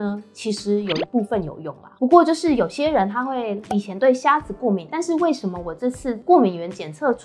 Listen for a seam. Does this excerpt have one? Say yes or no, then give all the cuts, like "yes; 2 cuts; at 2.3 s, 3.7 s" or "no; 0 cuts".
yes; 1 cut; at 1.8 s